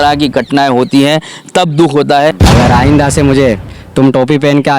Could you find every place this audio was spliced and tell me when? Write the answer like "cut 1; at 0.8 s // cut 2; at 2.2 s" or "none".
cut 1; at 2.4 s